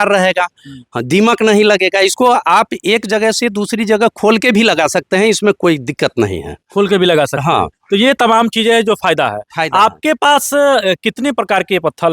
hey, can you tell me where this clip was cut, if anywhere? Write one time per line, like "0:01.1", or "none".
none